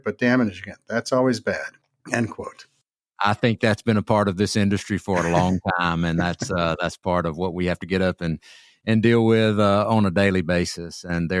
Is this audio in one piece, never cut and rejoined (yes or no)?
yes